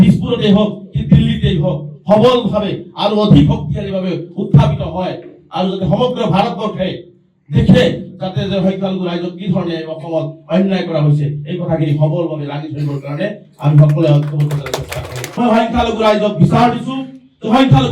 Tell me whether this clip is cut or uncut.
cut